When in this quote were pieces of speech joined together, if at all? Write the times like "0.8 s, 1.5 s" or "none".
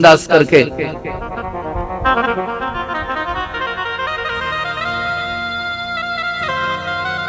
none